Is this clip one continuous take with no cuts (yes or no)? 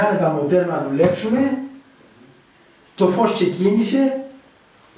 yes